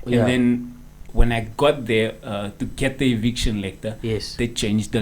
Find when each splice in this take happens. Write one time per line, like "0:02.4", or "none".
0:01.1

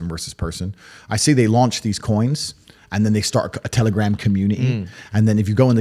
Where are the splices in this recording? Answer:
none

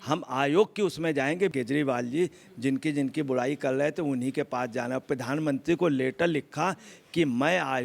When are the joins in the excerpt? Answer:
0:01.5

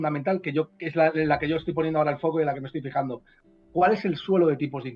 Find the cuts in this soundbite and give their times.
none

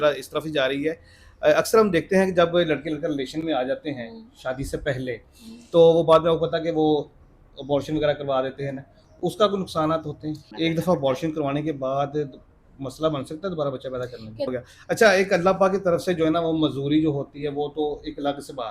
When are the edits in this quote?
0:10.5
0:14.5

